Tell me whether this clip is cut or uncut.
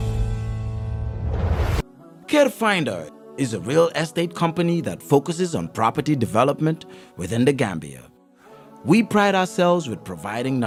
uncut